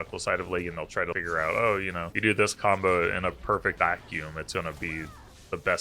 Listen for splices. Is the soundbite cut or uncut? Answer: cut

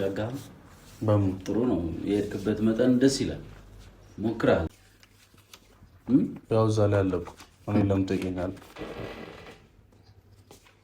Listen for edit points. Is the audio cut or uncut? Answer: cut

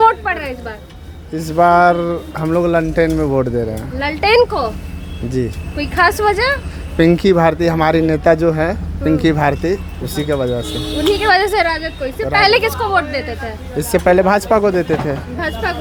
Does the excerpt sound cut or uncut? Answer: uncut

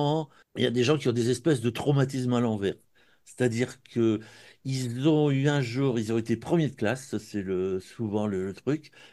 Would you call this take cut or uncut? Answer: uncut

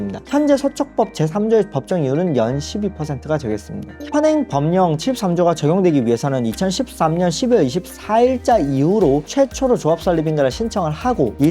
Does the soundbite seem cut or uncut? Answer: cut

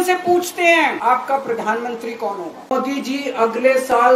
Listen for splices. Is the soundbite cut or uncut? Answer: cut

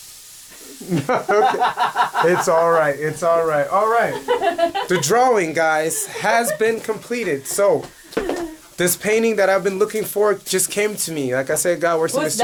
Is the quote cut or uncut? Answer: uncut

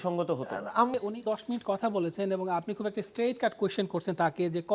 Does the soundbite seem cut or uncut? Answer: cut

